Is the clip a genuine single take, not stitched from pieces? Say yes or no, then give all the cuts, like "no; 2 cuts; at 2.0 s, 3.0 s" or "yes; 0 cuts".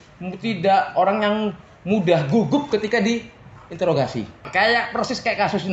no; 1 cut; at 4.5 s